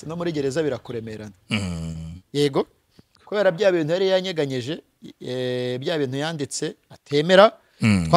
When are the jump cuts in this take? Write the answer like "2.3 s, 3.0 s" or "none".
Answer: 3.2 s